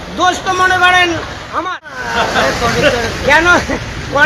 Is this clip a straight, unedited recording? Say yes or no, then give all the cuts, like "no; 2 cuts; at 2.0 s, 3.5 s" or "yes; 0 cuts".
no; 1 cut; at 2.0 s